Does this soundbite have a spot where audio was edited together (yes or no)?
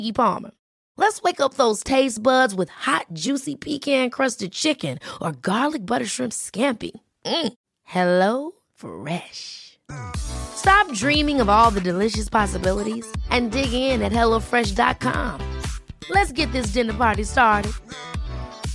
no